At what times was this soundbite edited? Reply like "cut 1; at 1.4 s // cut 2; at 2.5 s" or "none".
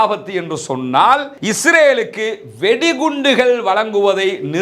cut 1; at 1.4 s